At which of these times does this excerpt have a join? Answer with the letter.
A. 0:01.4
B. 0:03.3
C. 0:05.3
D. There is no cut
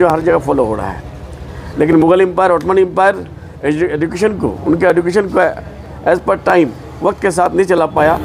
D